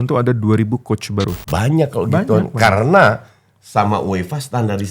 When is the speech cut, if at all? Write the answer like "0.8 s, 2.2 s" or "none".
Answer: 1.4 s